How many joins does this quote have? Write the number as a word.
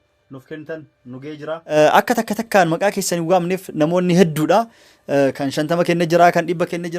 one